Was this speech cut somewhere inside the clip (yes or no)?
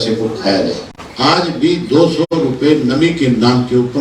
yes